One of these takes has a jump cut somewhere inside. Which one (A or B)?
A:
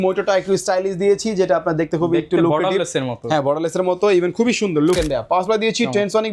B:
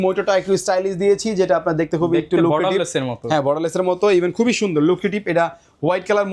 A